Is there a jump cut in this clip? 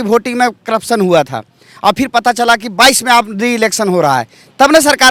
no; 0 cuts

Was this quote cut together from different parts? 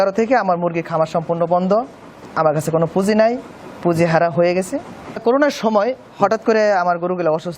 yes; 1 cut; at 5.1 s

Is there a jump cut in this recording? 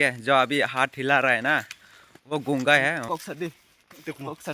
yes; 1 cut; at 3.1 s

